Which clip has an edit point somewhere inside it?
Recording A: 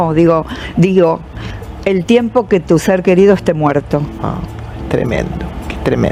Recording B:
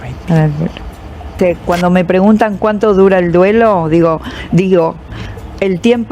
B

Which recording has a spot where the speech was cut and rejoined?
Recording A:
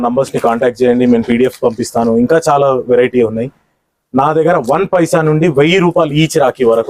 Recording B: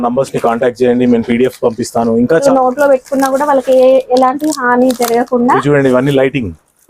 B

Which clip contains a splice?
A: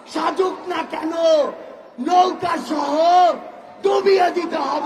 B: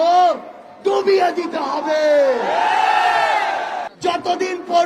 B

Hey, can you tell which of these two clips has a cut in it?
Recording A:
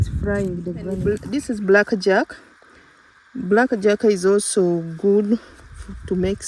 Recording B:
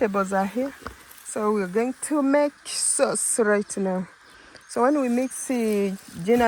A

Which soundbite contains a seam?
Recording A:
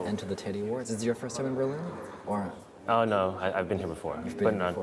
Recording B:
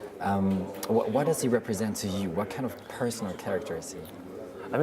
B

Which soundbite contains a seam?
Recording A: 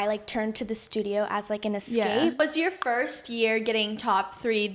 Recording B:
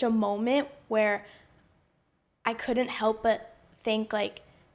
A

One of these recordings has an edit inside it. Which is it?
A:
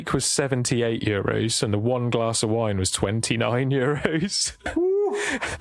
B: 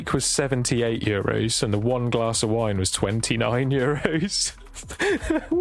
A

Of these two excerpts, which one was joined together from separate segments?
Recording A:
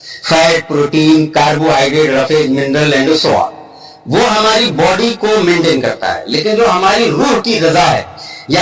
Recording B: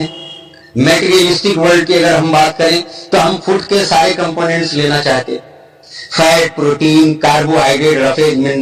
A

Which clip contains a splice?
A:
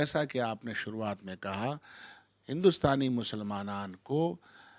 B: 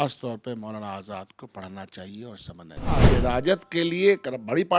B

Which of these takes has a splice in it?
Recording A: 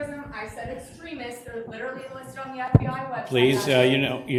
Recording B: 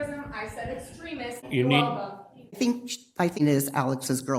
B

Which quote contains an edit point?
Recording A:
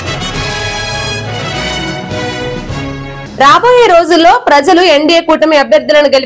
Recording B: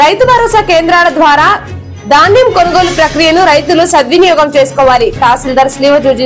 A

